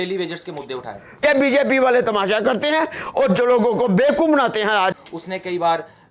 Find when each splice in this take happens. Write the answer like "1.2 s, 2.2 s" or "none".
1.2 s, 4.9 s